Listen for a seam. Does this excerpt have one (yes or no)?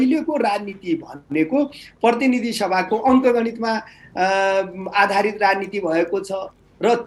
no